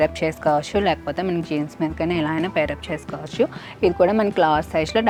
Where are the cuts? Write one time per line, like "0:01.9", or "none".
none